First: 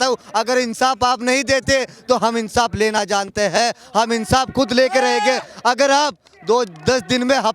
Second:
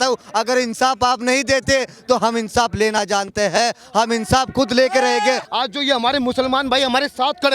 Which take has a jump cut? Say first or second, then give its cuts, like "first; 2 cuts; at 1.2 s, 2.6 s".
second; 1 cut; at 5.5 s